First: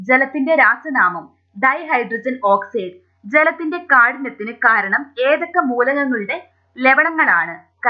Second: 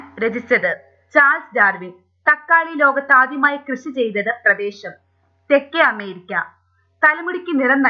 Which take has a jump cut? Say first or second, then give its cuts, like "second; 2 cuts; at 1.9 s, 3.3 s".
second; 1 cut; at 2.4 s